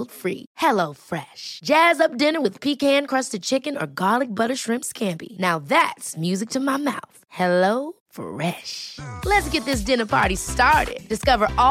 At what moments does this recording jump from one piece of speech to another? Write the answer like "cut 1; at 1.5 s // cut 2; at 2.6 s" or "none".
none